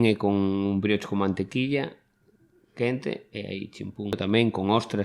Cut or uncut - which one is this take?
cut